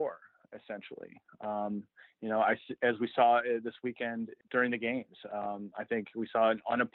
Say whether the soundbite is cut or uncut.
cut